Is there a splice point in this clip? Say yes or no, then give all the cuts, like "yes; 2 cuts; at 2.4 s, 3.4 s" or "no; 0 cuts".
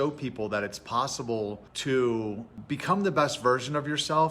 yes; 2 cuts; at 1.7 s, 2.5 s